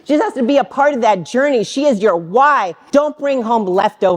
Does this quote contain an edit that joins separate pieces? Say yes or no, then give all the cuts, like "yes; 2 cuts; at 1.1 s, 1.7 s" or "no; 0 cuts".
yes; 1 cut; at 2.8 s